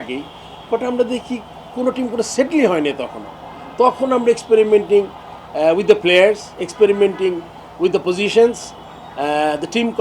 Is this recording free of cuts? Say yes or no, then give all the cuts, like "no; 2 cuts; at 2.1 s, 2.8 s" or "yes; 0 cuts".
yes; 0 cuts